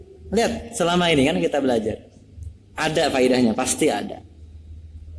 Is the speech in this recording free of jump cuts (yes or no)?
yes